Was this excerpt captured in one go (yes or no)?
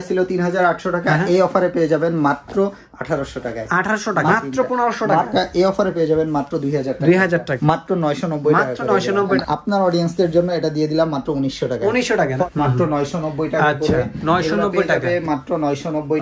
no